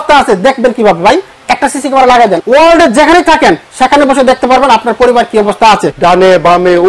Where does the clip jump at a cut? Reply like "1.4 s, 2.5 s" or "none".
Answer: 2.4 s, 5.9 s